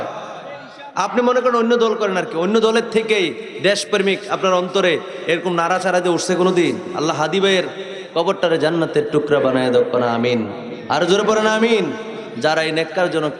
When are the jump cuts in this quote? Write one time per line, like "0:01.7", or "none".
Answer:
0:06.9